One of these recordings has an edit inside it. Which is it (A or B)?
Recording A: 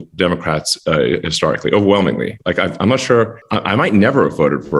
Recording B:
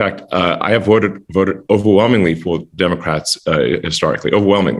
A